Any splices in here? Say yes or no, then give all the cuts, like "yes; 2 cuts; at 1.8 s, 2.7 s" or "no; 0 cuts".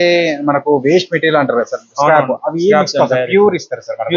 no; 0 cuts